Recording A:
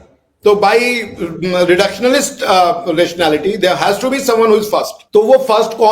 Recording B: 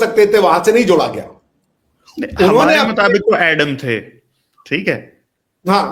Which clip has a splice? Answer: A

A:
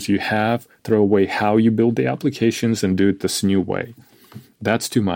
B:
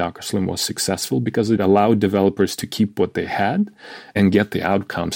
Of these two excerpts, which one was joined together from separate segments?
B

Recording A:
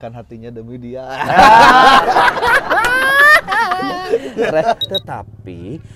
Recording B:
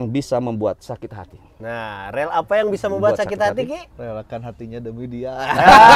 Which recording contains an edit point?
A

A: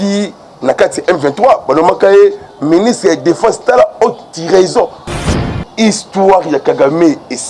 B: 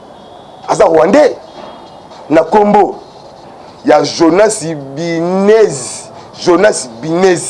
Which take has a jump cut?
A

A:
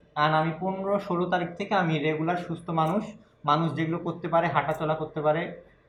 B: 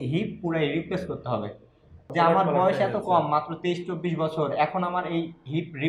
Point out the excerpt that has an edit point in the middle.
B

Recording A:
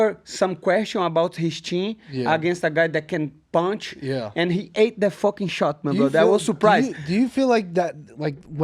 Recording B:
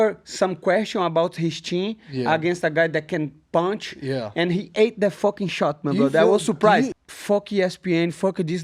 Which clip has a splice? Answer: B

